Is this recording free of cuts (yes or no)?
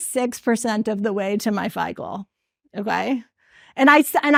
yes